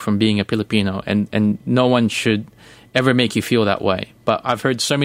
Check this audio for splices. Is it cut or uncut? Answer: uncut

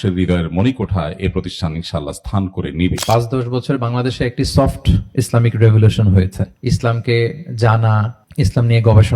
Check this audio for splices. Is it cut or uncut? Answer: cut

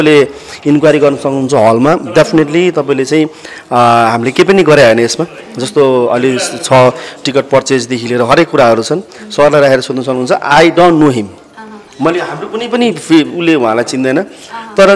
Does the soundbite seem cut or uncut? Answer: uncut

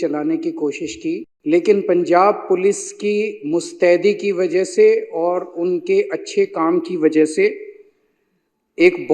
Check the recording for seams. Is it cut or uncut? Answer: cut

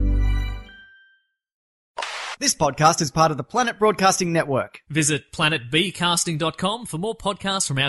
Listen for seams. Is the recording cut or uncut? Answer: cut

